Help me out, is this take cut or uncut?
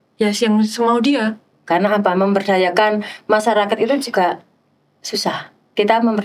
cut